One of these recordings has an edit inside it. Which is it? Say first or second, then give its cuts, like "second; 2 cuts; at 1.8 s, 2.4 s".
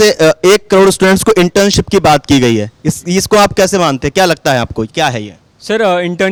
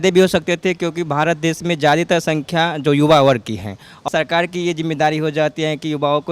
second; 1 cut; at 4.0 s